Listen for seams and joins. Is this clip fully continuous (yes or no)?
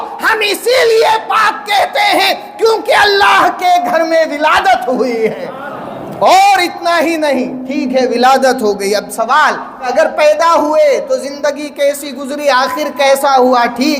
no